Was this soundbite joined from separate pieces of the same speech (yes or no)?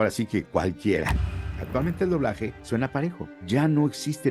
yes